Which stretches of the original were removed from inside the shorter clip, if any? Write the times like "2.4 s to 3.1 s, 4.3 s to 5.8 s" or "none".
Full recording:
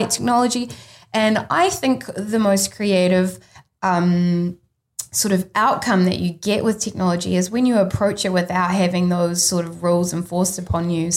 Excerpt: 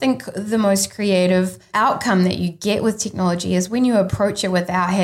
3.5 s to 5.5 s